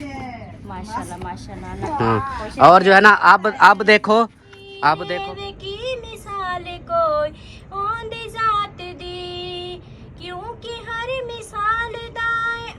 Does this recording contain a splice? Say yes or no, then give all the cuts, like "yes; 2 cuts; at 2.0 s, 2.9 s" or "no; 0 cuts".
yes; 1 cut; at 5.0 s